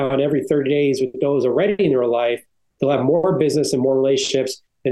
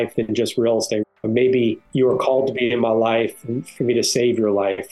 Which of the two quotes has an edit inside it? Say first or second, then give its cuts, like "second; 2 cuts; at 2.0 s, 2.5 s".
second; 2 cuts; at 1.0 s, 1.8 s